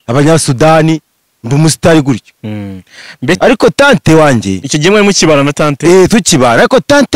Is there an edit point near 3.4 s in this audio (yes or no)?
yes